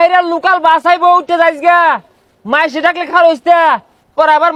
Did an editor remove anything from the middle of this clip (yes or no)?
no